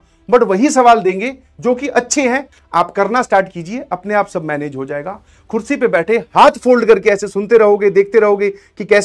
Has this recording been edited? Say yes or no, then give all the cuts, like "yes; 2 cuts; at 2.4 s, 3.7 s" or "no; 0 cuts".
yes; 1 cut; at 2.5 s